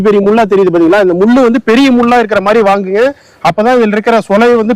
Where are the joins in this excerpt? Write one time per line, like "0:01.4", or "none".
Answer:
none

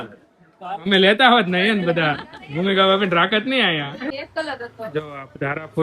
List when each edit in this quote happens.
0:04.1

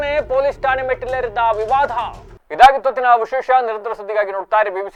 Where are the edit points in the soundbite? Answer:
none

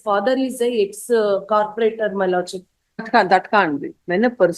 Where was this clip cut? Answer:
0:03.0

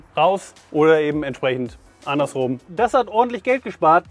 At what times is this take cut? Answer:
0:02.6

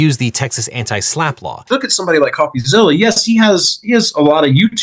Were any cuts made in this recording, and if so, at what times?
0:01.5

